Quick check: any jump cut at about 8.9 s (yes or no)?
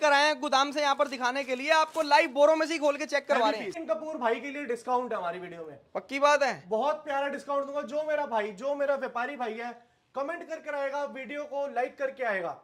no